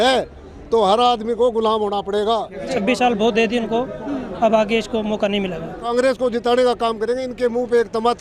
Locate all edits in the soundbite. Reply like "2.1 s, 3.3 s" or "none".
2.6 s, 5.9 s